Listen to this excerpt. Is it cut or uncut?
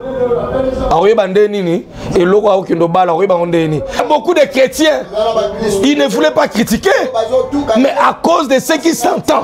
cut